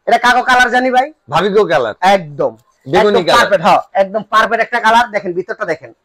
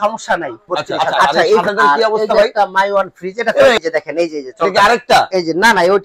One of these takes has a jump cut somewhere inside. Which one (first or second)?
second